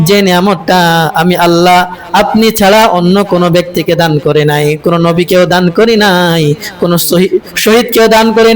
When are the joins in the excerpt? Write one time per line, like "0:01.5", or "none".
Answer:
none